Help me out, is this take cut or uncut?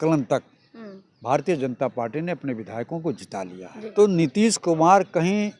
cut